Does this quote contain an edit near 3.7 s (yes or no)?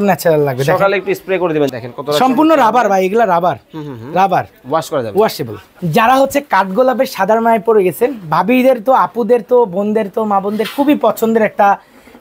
no